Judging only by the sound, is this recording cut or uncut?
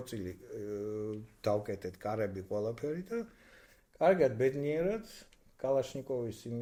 uncut